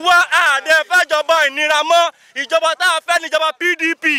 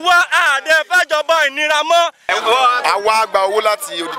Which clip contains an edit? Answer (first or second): second